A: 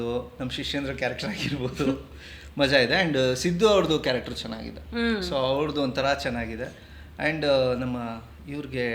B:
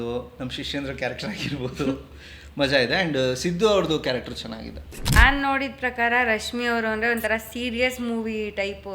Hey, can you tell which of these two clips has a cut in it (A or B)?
B